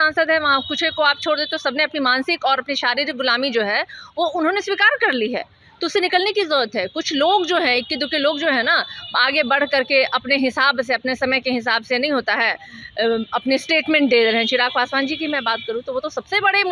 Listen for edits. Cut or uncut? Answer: uncut